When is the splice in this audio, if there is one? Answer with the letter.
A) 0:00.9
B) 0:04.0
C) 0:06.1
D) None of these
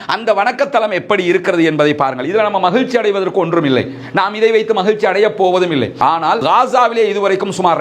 C